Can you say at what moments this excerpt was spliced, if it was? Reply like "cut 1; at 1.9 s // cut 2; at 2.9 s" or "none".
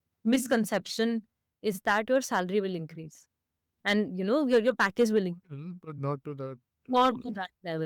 none